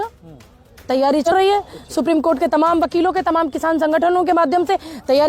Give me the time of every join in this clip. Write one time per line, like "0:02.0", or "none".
0:01.3

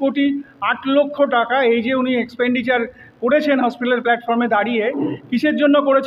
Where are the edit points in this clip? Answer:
none

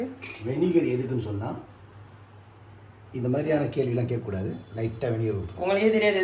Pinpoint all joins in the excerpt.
0:04.7

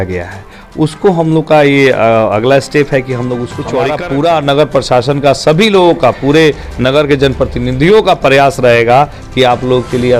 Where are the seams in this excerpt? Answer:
0:04.0

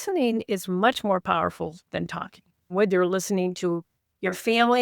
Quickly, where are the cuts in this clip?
0:02.6

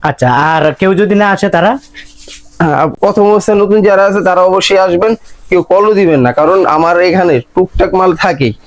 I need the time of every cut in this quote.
none

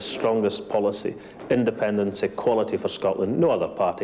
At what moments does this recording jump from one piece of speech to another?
none

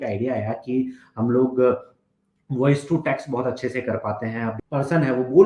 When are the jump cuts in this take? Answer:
0:04.5

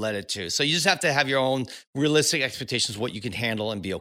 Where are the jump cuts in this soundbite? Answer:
0:01.8

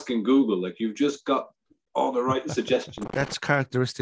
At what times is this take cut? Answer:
0:03.0

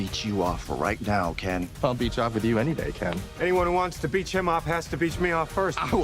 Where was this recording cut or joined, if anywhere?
0:01.7

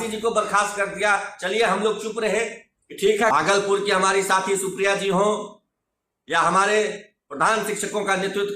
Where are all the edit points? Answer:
0:03.3

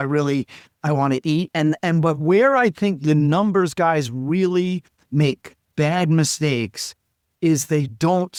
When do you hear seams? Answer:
none

